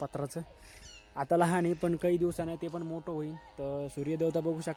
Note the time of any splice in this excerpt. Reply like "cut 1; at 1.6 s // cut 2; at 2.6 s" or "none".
none